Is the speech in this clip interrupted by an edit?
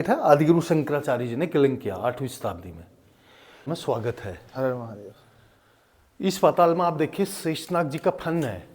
yes; 1 cut; at 3.7 s

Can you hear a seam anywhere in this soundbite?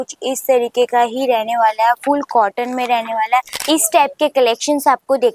yes; 1 cut; at 3.6 s

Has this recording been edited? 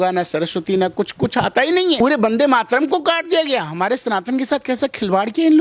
yes; 1 cut; at 2.0 s

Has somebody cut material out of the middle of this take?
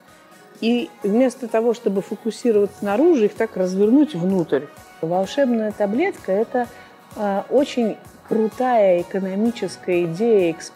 yes; 1 cut; at 4.9 s

